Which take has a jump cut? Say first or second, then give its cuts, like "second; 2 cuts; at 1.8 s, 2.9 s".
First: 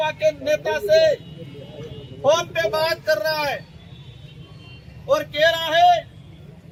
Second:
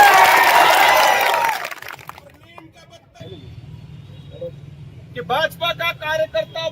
second; 1 cut; at 3.2 s